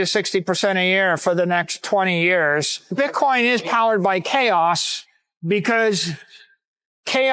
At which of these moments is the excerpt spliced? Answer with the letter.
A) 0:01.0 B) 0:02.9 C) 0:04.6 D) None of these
B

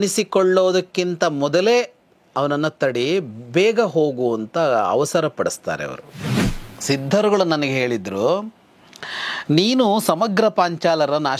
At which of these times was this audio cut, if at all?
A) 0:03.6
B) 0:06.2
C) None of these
B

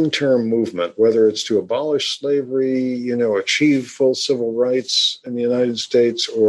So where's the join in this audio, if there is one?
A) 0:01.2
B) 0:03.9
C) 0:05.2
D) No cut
C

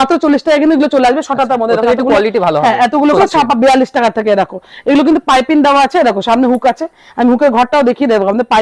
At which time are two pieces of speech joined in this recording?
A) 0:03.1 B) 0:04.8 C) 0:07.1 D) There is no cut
A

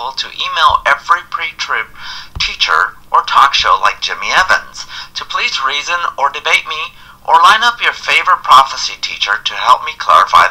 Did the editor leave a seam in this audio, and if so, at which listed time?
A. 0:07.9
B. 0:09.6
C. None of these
C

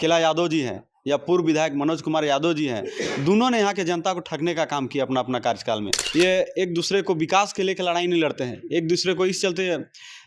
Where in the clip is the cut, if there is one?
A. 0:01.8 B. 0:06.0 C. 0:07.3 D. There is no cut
B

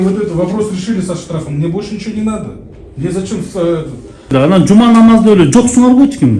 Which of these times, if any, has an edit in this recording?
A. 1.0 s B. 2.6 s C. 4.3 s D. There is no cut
C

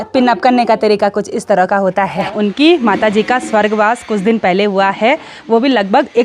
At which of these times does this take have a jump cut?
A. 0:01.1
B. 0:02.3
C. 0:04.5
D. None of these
B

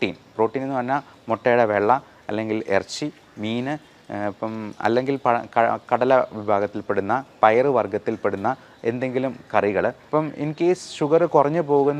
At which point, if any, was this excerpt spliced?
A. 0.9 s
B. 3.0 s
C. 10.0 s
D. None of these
C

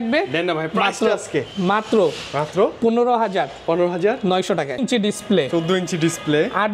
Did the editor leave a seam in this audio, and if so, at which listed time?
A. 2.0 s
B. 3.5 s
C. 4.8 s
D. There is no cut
C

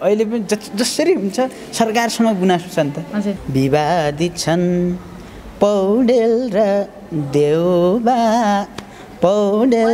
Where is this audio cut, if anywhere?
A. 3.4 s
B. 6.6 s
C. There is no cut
A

